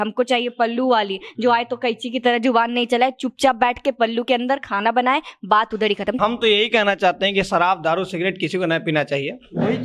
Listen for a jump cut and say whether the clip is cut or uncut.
cut